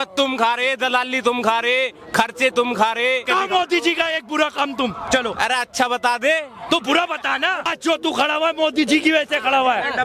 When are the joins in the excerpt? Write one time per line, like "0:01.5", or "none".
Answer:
0:03.2
0:07.7